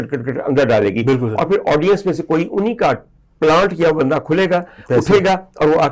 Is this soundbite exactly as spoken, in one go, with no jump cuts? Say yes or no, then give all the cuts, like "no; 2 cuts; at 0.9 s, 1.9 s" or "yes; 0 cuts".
yes; 0 cuts